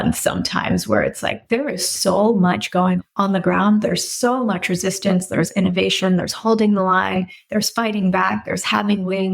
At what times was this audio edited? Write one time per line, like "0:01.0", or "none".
0:03.1